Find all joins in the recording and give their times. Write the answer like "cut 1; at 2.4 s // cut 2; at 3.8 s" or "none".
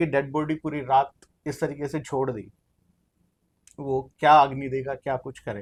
none